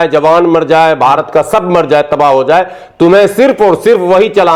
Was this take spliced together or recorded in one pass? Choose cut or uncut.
uncut